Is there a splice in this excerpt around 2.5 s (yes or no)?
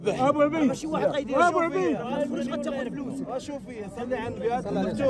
no